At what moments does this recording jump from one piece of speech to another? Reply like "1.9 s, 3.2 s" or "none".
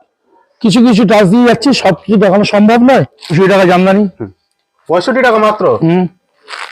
3.2 s